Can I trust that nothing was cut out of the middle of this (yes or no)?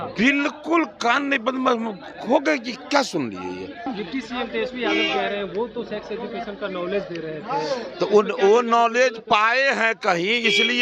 no